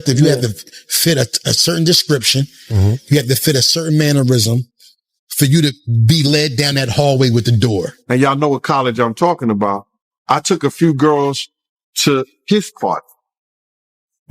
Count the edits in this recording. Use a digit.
1